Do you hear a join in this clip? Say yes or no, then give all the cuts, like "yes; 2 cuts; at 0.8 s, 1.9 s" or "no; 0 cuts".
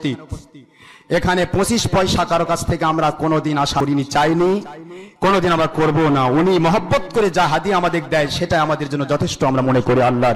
yes; 1 cut; at 3.8 s